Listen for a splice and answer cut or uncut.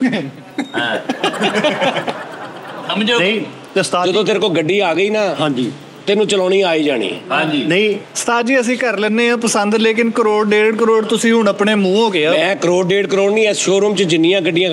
uncut